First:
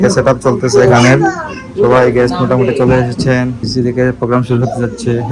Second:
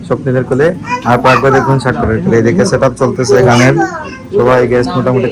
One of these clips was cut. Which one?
first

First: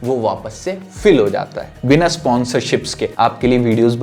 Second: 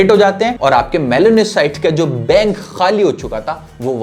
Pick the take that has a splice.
first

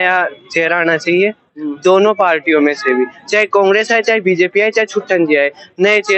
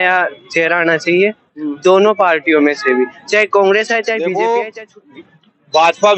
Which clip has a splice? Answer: second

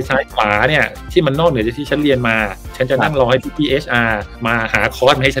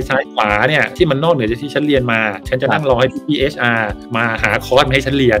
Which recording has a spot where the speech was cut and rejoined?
second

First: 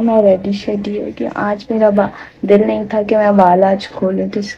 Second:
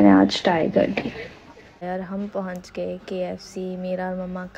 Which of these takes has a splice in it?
second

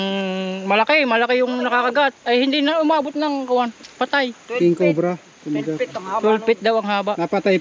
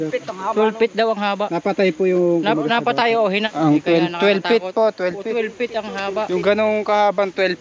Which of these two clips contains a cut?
second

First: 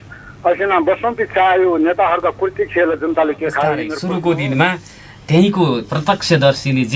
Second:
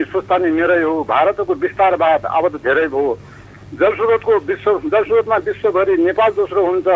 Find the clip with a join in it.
first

